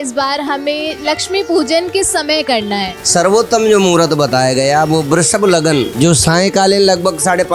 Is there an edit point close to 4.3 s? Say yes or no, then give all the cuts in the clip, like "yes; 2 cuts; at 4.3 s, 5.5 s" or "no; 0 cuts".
no; 2 cuts; at 2.9 s, 5.9 s